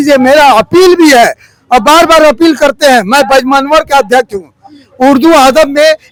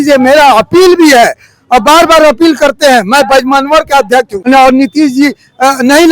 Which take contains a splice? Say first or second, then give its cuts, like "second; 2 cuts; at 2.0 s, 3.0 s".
second; 1 cut; at 4.3 s